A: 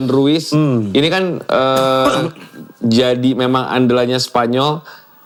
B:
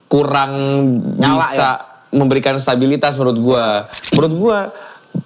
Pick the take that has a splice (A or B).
B